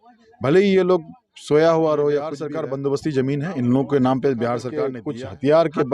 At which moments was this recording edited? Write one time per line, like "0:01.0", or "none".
0:02.5
0:04.9

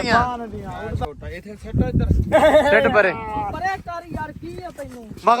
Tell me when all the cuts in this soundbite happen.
0:01.0

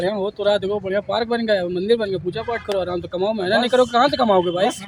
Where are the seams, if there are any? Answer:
none

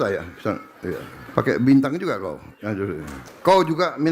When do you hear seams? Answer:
0:01.1
0:03.2

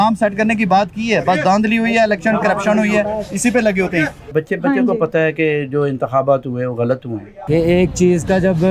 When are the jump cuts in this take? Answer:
0:04.3
0:07.4

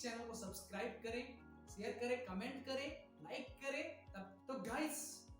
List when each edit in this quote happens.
0:04.4

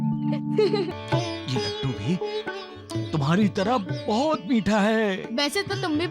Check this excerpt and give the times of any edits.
0:00.9

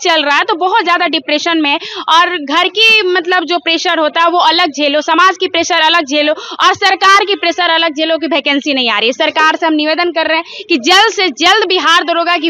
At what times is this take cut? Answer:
none

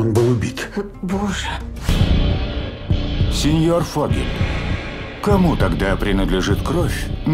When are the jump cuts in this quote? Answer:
0:01.9

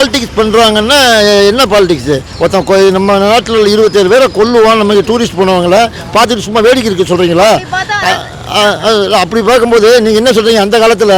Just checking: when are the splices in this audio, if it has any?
none

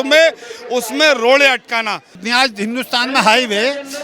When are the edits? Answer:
0:02.2

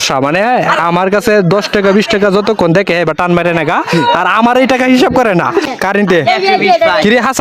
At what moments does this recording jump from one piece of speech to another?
0:05.7

